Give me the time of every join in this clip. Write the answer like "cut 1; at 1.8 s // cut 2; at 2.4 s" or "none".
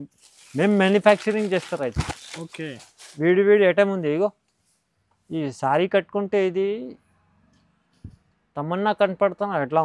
none

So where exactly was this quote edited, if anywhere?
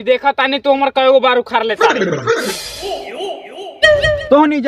cut 1; at 2.5 s

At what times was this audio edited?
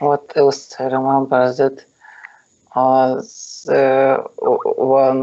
cut 1; at 4.0 s

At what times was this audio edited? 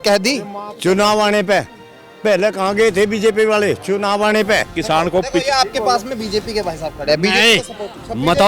cut 1; at 4.8 s

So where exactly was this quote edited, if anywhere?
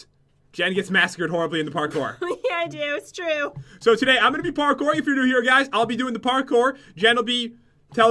none

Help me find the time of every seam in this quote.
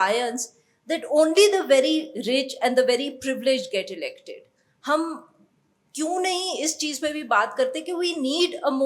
none

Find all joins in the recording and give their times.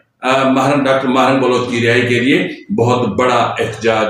none

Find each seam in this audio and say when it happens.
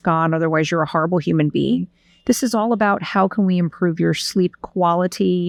none

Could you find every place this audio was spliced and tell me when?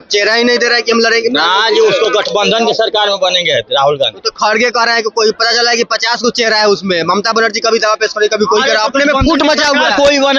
none

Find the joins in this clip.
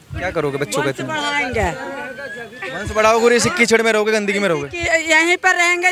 none

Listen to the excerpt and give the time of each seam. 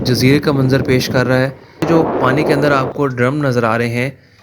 cut 1; at 1.8 s

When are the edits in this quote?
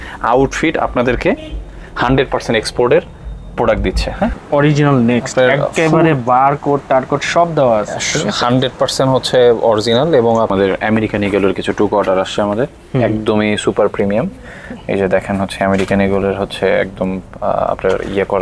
cut 1; at 4.4 s // cut 2; at 10.5 s

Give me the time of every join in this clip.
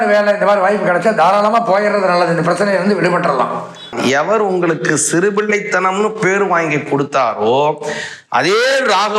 cut 1; at 3.9 s

